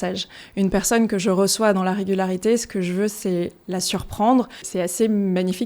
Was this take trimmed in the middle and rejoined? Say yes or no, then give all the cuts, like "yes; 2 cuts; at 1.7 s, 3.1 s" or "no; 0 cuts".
yes; 1 cut; at 4.7 s